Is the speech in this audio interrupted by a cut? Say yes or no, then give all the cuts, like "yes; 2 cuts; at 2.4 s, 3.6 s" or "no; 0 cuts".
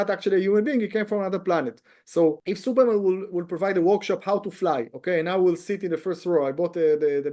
yes; 1 cut; at 2.4 s